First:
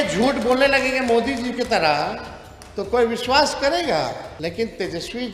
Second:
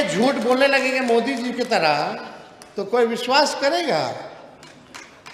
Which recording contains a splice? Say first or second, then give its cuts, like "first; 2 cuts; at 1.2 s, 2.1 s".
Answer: first; 1 cut; at 4.3 s